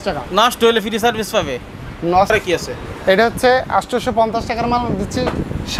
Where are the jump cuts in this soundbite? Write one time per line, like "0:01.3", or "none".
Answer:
0:02.3